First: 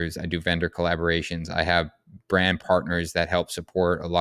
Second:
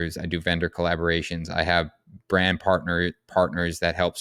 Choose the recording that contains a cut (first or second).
first